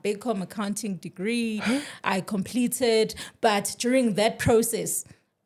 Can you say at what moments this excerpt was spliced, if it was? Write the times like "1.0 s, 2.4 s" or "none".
none